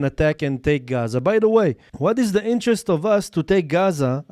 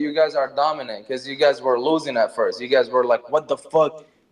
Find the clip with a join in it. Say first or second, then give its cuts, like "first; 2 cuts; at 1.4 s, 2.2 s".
first; 1 cut; at 1.9 s